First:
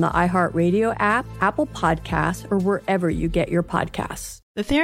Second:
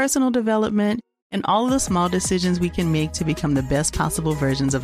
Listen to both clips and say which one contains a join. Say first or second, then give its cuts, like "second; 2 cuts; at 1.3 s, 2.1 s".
first; 1 cut; at 1.3 s